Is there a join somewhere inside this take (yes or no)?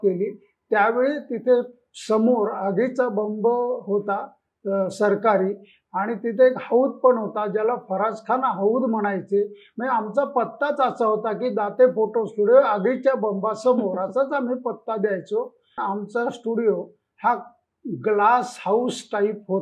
yes